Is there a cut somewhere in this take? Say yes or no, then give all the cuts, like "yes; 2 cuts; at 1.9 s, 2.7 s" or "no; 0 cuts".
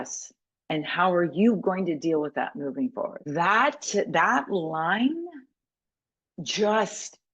yes; 1 cut; at 3.2 s